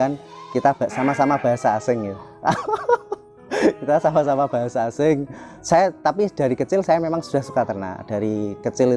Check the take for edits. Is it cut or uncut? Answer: cut